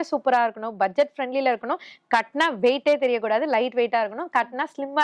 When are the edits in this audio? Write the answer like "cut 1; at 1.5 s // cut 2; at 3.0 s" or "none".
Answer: none